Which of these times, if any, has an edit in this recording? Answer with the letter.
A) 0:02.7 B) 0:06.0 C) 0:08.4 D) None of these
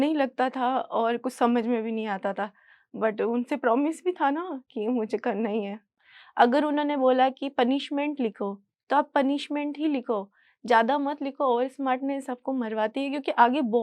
B